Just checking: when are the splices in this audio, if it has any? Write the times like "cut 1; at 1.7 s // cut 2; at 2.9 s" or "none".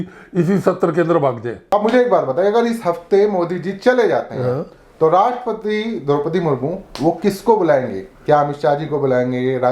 cut 1; at 1.6 s